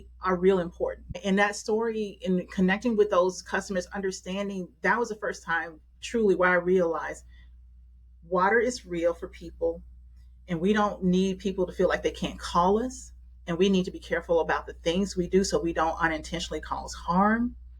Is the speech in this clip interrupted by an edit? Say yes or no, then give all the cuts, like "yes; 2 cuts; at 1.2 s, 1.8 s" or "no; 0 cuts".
yes; 1 cut; at 1.2 s